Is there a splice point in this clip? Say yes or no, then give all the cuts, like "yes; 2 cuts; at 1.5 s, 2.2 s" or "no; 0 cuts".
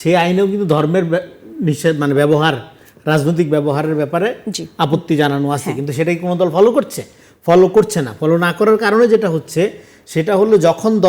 no; 0 cuts